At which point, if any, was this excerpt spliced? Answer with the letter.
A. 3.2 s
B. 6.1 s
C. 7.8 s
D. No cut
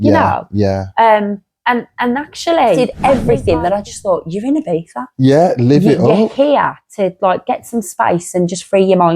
A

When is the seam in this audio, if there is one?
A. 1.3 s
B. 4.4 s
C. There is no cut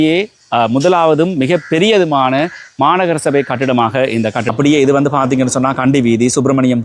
B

